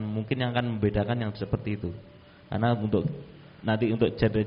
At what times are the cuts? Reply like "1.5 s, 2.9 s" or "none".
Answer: none